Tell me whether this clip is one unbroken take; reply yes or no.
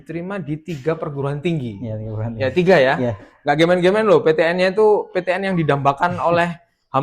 yes